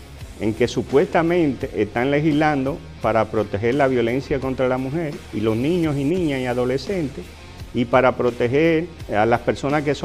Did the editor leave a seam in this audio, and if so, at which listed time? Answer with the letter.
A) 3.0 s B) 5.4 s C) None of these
C